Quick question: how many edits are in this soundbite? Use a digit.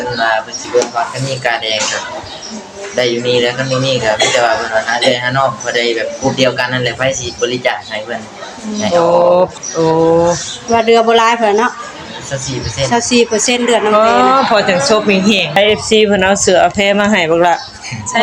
2